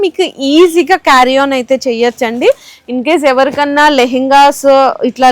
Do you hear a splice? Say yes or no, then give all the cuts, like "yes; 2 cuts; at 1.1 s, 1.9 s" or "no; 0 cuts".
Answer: no; 0 cuts